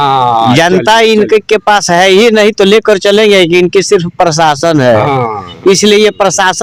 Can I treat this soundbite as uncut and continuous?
yes; 0 cuts

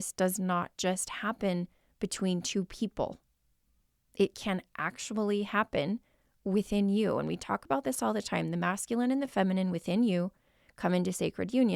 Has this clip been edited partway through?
no; 0 cuts

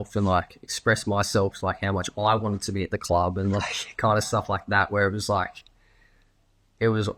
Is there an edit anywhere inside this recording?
no; 0 cuts

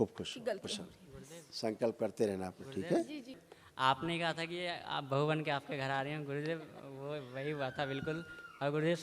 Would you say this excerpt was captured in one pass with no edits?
no; 1 cut; at 3.4 s

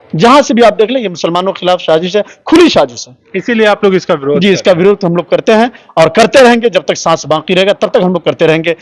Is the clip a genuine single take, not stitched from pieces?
yes; 0 cuts

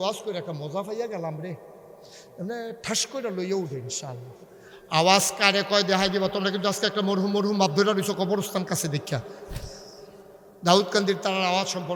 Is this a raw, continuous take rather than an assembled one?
yes; 0 cuts

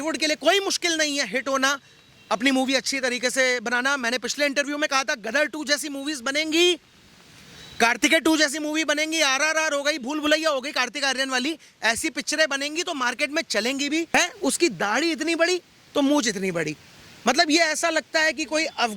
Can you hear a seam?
yes; 1 cut; at 14.1 s

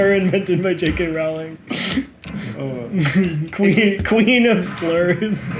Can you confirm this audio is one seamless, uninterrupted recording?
yes; 0 cuts

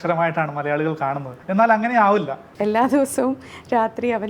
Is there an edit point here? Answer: yes; 2 cuts; at 1.3 s, 2.4 s

